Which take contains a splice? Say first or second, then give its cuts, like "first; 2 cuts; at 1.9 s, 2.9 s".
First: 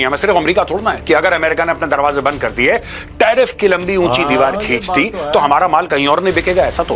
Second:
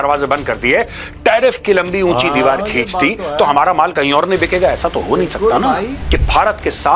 second; 1 cut; at 5.9 s